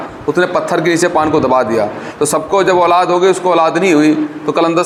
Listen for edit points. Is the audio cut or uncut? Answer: uncut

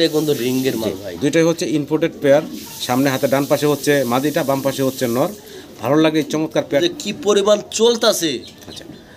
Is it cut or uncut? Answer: cut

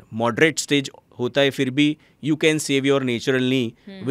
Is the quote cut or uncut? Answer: uncut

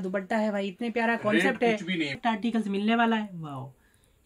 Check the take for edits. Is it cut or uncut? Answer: cut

